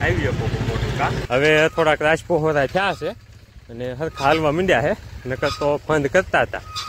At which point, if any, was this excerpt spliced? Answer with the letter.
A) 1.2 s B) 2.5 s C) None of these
A